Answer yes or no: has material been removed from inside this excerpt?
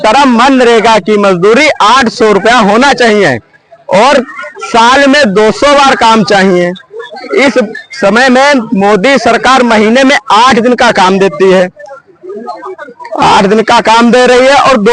no